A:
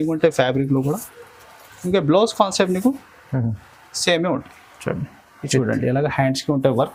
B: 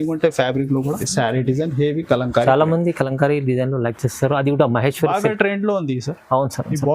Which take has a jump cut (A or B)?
B